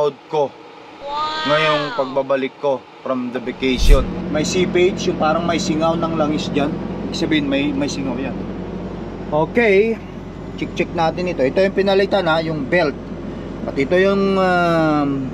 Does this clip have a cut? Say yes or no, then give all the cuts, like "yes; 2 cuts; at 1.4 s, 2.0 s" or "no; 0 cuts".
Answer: yes; 1 cut; at 4.1 s